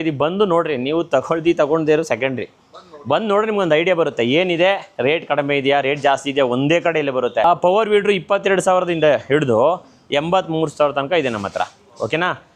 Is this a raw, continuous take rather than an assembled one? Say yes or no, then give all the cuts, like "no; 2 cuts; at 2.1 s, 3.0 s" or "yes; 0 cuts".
no; 1 cut; at 7.4 s